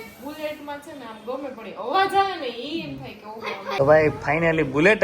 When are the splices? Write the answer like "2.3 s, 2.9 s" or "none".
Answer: 3.8 s